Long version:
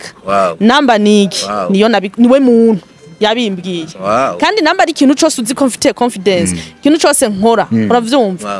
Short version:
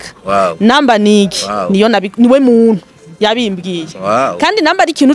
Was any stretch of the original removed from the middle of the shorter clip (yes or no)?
no